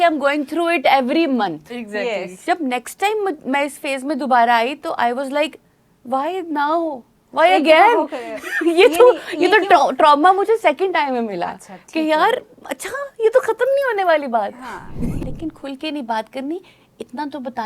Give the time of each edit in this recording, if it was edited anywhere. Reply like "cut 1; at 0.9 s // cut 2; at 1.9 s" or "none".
cut 1; at 2.3 s // cut 2; at 15.1 s